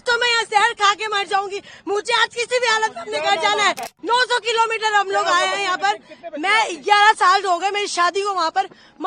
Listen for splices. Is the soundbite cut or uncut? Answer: cut